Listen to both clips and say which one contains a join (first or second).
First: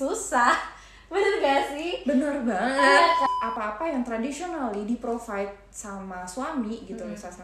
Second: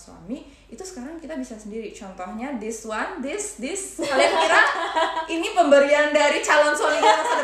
first